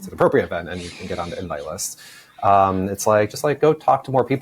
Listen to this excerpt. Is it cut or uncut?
uncut